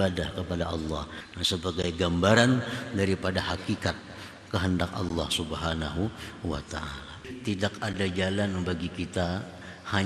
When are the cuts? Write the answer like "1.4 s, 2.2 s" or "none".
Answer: 1.1 s, 7.3 s